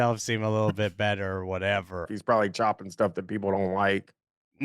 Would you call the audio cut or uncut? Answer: cut